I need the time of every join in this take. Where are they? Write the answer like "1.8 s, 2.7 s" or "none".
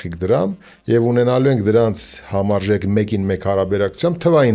none